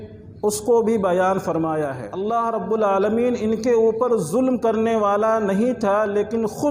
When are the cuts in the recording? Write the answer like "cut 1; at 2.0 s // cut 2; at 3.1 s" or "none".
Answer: cut 1; at 2.1 s